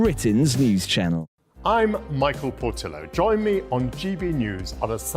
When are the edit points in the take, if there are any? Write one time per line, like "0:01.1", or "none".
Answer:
0:01.3